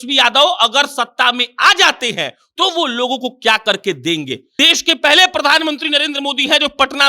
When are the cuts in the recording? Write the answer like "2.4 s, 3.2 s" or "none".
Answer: 4.4 s

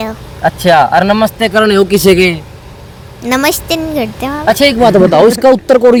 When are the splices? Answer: none

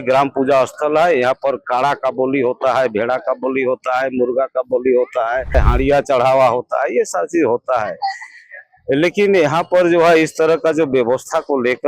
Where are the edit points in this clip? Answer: 5.5 s

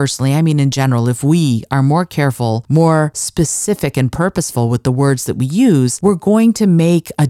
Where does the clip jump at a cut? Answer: 2.6 s, 3.2 s, 5.9 s

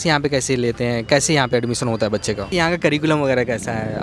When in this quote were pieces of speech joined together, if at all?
2.5 s

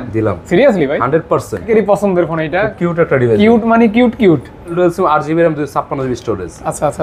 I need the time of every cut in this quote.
1.7 s, 4.8 s

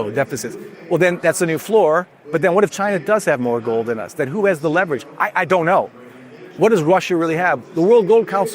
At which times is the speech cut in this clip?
none

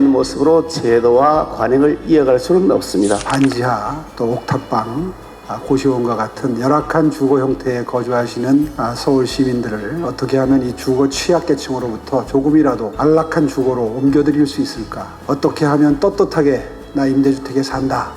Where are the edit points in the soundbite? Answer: 3.2 s

